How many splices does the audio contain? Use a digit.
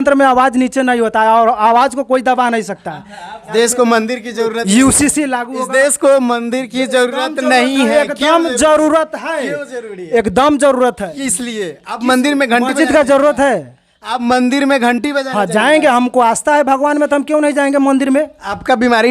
1